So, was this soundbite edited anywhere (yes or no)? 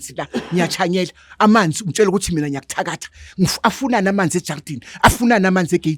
no